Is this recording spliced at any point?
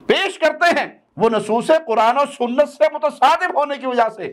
no; 0 cuts

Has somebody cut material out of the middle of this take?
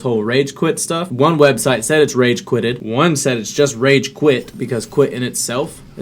yes; 3 cuts; at 1.1 s, 2.8 s, 4.5 s

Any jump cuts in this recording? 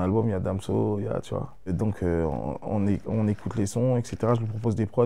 no; 0 cuts

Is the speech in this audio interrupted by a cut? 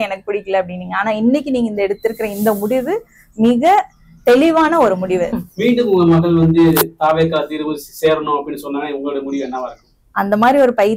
yes; 1 cut; at 5.3 s

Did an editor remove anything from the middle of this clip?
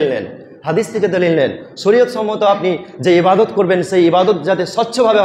no; 0 cuts

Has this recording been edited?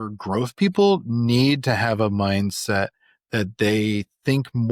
no; 0 cuts

